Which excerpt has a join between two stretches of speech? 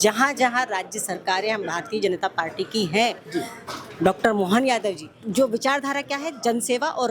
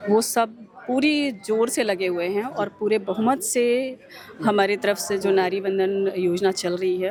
first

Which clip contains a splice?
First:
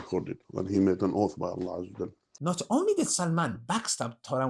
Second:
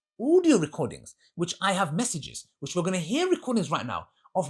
first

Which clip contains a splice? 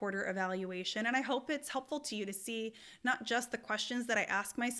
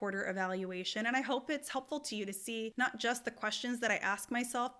second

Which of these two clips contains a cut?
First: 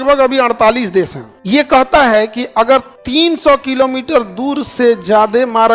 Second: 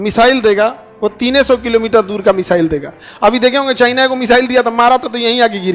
first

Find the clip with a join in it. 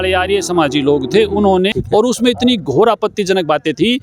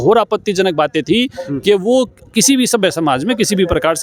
first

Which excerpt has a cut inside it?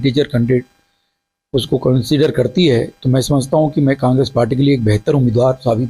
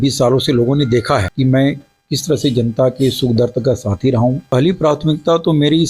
second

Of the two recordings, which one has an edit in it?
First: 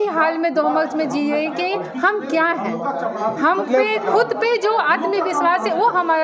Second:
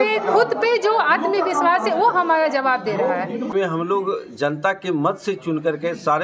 second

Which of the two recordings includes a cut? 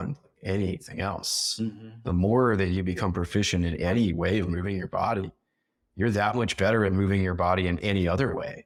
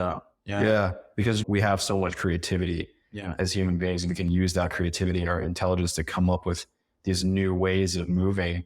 second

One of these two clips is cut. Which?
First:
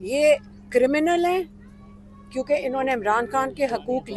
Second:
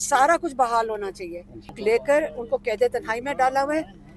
second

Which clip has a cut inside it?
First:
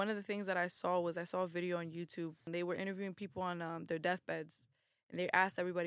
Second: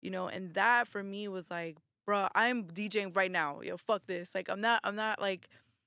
first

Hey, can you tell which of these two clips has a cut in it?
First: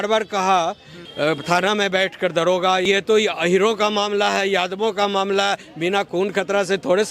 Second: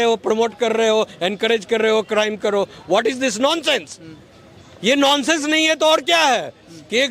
first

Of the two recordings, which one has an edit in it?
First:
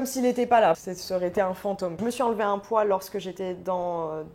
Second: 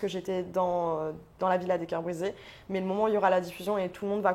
first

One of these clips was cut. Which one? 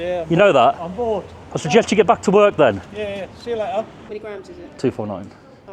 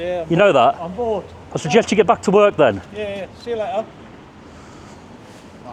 first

